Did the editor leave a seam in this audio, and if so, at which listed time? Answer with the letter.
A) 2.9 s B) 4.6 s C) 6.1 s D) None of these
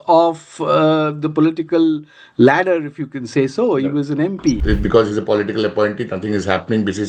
B